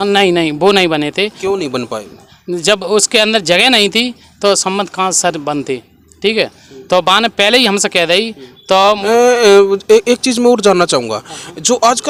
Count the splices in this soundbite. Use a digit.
0